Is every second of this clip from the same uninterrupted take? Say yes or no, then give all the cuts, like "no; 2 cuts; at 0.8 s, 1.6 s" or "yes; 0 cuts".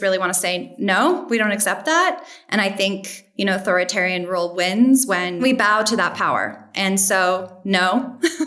no; 1 cut; at 5.4 s